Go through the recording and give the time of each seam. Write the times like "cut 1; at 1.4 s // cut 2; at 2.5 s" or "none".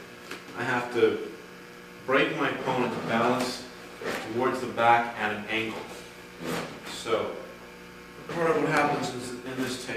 none